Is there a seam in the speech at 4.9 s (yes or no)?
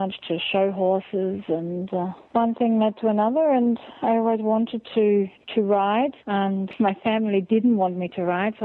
no